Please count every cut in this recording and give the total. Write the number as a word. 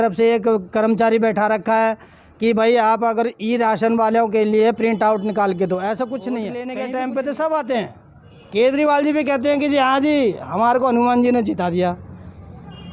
one